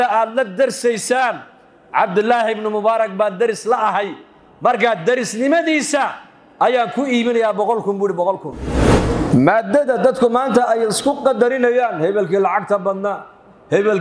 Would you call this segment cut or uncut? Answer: cut